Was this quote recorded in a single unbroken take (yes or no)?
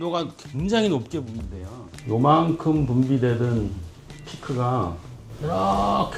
yes